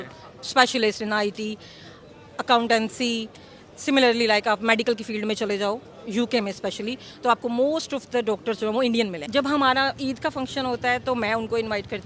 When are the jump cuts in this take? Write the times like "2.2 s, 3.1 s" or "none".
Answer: 9.2 s